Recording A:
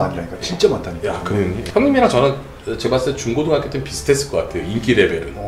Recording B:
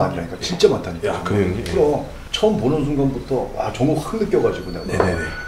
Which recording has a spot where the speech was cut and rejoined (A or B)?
A